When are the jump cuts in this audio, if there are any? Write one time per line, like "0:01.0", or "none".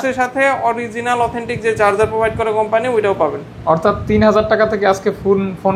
none